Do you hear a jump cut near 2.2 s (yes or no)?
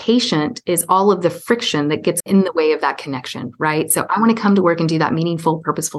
yes